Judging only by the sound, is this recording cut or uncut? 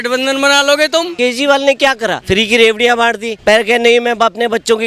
cut